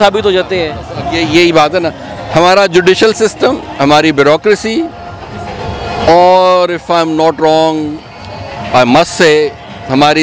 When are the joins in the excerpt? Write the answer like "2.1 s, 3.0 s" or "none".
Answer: none